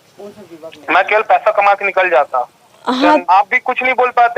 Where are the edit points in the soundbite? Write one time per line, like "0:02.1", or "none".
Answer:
0:03.2